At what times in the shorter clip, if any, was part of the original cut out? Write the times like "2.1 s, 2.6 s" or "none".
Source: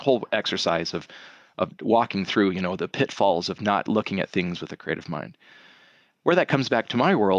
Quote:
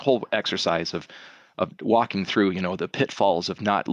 none